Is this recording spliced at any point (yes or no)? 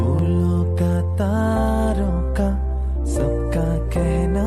no